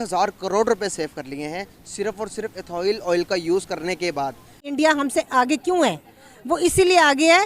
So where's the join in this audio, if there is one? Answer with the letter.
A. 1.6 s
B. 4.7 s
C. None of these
B